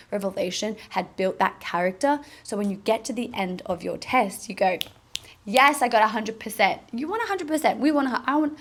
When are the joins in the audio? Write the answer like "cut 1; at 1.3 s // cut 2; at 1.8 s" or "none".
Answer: none